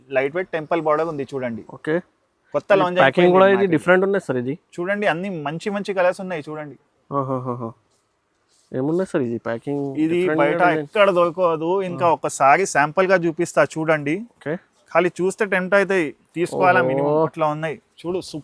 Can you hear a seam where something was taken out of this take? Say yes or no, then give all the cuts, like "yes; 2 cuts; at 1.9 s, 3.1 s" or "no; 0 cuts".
no; 0 cuts